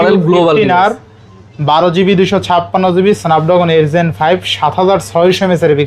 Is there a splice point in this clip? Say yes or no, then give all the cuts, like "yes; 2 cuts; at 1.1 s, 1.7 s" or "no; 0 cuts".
no; 0 cuts